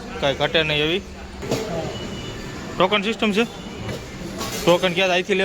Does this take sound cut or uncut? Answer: cut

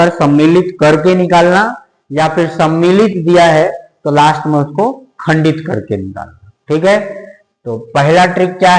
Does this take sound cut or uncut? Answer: uncut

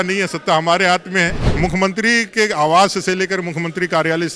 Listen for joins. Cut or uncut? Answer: cut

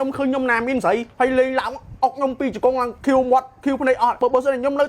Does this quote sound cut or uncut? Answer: cut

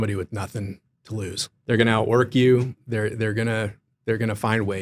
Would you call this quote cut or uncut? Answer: cut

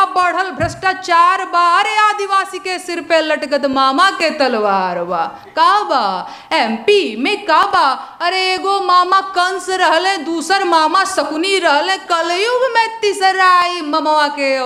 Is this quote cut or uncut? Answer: uncut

